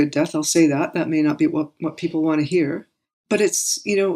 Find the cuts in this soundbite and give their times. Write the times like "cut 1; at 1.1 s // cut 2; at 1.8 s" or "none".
none